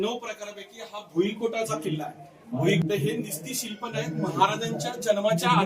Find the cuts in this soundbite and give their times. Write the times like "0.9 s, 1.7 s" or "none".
2.8 s